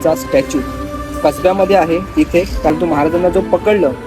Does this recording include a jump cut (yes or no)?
yes